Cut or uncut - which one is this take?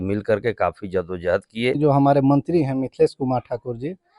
cut